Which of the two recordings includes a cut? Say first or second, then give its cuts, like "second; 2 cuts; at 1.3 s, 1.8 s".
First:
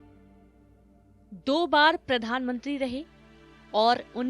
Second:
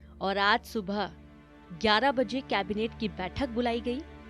first; 1 cut; at 1.1 s